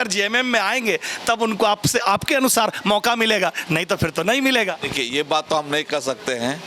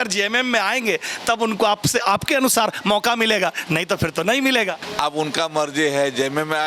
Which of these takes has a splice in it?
second; 1 cut; at 4.8 s

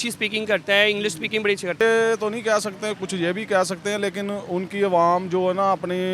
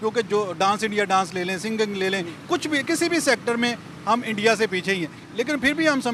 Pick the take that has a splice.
first; 1 cut; at 1.8 s

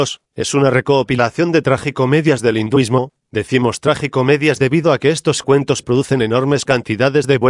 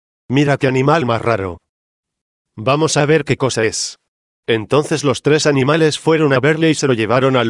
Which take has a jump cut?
second; 1 cut; at 5.9 s

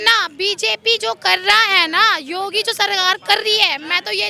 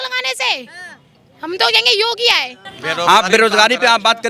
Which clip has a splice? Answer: second; 1 cut; at 2.6 s

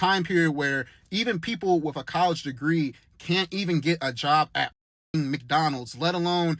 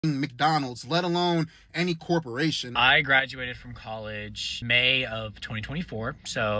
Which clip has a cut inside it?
second; 2 cuts; at 2.6 s, 4.5 s

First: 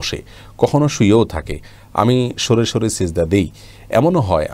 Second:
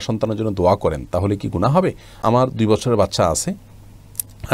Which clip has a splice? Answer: second; 1 cut; at 2.2 s

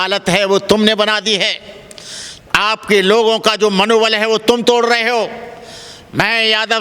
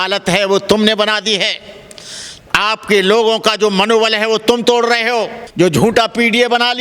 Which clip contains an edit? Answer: second; 1 cut; at 5.4 s

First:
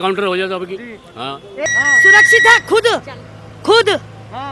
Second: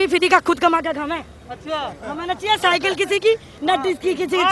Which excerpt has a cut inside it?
first; 1 cut; at 1.4 s

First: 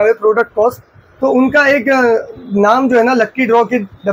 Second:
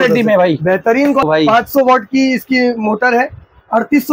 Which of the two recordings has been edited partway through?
second; 1 cut; at 1.2 s

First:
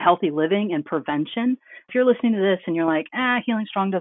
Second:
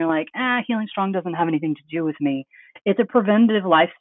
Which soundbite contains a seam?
first; 1 cut; at 1.9 s

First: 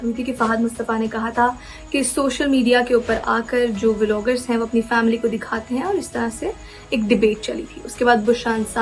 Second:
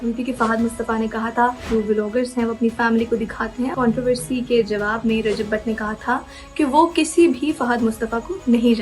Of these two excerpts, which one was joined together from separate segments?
second; 2 cuts; at 1.6 s, 3.7 s

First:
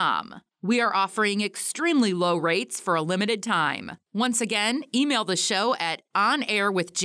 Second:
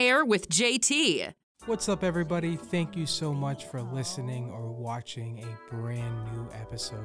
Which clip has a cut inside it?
second; 1 cut; at 1.5 s

